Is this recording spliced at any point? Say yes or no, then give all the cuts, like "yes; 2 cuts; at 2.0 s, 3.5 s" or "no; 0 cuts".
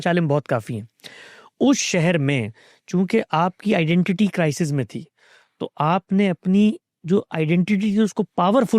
no; 0 cuts